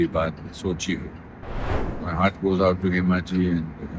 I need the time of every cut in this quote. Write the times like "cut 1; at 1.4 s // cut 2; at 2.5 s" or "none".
cut 1; at 1.7 s